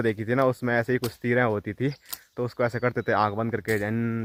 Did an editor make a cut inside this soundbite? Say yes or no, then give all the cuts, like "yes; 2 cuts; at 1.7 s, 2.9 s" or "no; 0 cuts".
no; 0 cuts